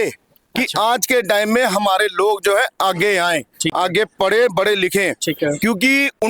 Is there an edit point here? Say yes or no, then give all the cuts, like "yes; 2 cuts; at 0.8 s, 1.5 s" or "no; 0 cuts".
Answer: no; 0 cuts